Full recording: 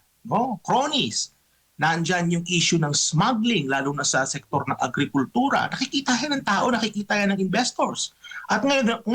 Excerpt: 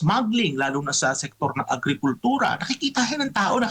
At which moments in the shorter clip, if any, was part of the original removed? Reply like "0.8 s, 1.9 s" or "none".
none